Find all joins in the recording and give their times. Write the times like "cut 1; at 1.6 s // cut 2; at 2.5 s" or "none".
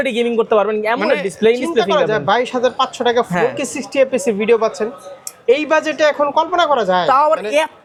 none

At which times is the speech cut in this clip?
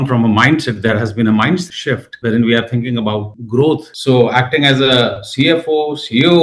cut 1; at 3.9 s

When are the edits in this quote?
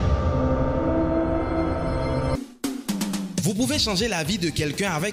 cut 1; at 2.4 s

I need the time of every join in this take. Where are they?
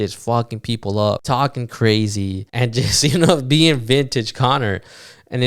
cut 1; at 1.2 s // cut 2; at 2.4 s

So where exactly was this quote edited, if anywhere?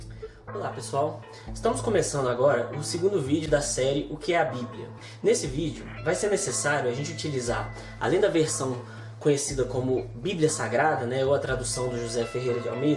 none

